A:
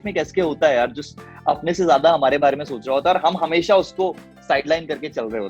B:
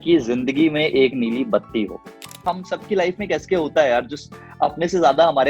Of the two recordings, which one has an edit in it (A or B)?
B